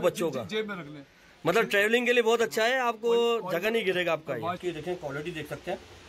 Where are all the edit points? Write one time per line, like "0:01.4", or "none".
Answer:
0:04.6